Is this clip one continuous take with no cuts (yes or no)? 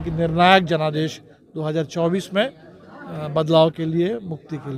yes